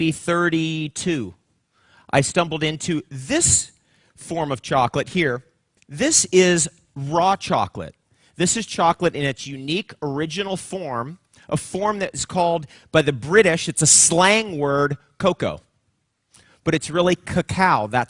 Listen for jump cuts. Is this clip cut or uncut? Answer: uncut